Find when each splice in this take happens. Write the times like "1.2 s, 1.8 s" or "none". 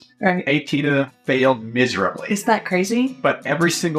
1.1 s